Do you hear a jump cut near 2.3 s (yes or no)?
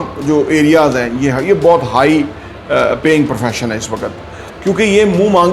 no